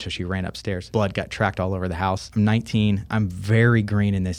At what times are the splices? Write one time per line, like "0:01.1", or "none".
0:00.8
0:02.3
0:03.1

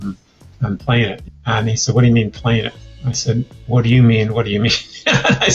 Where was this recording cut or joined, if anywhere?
0:01.2

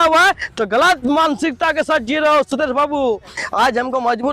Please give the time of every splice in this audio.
0:03.4

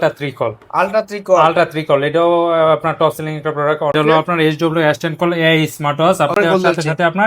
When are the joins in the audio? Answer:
0:03.9
0:06.3

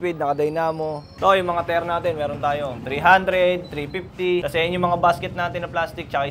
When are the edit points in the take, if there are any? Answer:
0:01.1
0:02.8
0:04.5

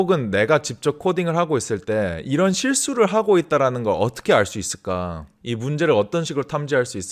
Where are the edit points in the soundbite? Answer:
none

